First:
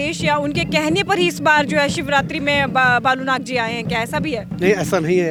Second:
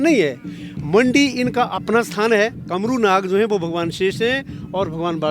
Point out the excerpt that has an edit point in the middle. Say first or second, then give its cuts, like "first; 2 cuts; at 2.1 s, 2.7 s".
second; 1 cut; at 2.6 s